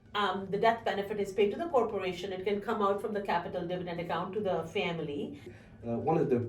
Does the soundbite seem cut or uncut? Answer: cut